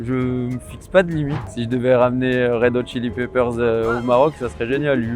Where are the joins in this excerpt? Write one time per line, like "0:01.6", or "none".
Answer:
0:01.4